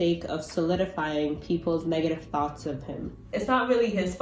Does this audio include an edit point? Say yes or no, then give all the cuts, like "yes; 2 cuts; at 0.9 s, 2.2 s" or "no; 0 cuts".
yes; 1 cut; at 3.2 s